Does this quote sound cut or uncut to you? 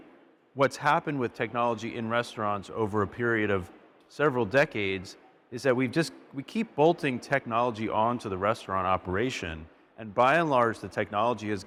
uncut